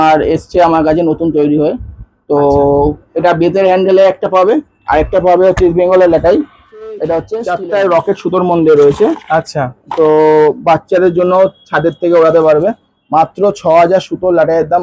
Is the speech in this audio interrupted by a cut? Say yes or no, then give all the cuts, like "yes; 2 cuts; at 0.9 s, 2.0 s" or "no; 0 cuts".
yes; 1 cut; at 7.4 s